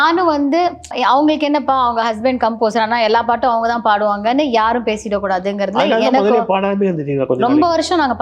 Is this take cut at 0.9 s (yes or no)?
yes